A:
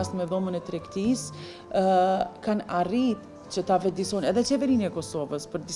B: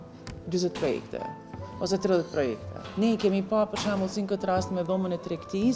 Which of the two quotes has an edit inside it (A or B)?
B